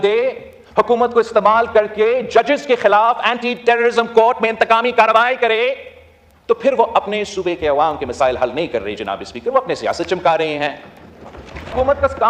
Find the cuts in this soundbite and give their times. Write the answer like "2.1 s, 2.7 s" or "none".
none